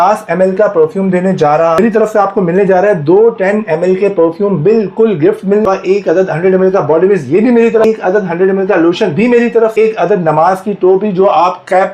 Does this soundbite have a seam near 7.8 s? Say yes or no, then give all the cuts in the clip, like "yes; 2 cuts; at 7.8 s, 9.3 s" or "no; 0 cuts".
yes; 4 cuts; at 1.8 s, 5.7 s, 7.8 s, 9.7 s